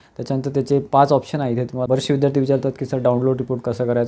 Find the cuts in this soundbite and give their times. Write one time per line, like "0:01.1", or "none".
0:01.6